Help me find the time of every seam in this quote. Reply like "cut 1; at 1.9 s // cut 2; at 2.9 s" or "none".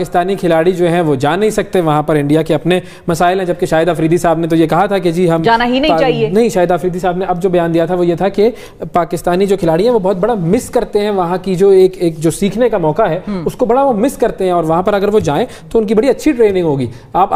none